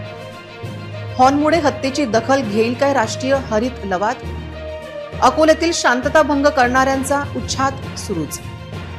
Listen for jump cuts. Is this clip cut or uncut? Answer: uncut